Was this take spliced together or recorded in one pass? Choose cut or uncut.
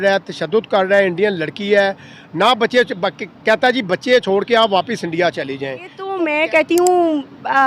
cut